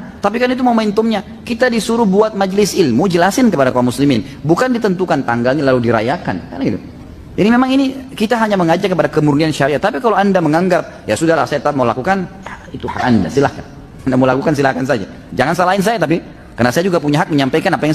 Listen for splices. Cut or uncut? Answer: uncut